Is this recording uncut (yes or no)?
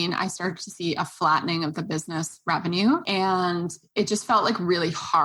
no